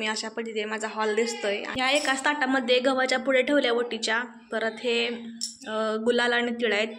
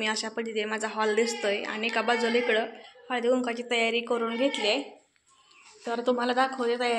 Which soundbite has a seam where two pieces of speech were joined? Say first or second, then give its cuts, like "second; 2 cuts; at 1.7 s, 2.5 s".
first; 1 cut; at 1.7 s